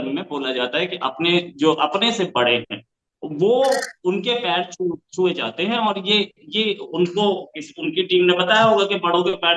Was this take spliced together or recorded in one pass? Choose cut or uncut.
uncut